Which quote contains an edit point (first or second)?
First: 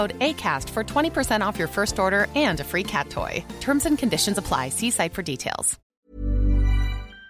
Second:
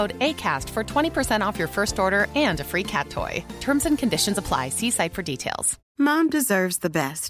first